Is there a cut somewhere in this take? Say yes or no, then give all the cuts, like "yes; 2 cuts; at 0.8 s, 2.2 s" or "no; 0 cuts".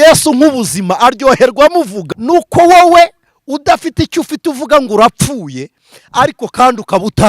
yes; 1 cut; at 2.0 s